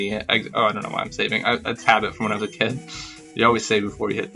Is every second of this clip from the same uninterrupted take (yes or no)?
yes